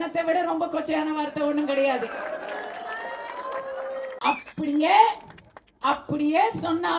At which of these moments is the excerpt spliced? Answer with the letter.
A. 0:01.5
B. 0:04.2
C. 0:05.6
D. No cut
B